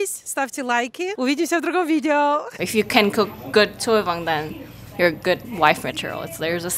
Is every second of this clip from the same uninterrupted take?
no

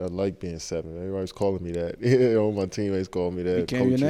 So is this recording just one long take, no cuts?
yes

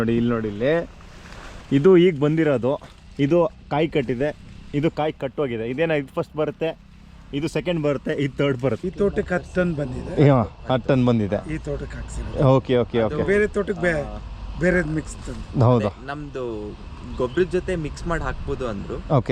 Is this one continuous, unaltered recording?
no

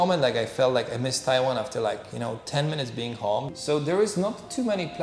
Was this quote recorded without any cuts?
no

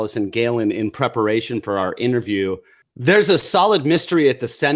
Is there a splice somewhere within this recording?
no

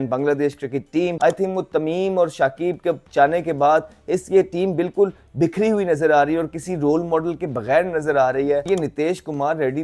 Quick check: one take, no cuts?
no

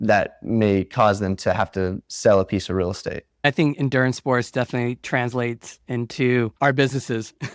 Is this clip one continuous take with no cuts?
no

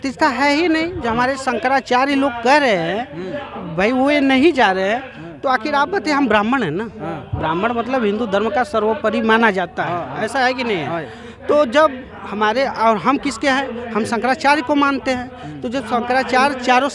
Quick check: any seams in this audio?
no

